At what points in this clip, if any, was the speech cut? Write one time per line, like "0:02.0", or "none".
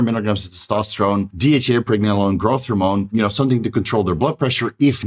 0:01.3
0:03.1